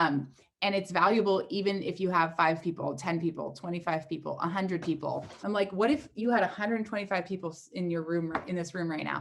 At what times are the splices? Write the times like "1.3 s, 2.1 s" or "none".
5.3 s